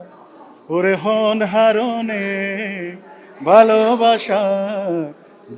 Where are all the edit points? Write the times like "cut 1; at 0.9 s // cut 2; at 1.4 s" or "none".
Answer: none